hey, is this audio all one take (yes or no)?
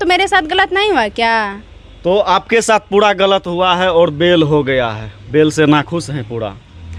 yes